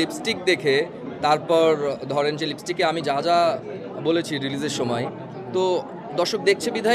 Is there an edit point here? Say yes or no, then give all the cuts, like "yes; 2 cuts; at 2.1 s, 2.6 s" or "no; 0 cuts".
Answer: no; 0 cuts